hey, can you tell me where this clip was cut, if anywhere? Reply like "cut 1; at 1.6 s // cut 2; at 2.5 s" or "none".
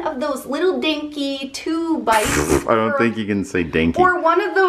none